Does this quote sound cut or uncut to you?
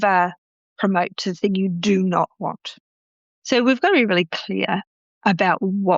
cut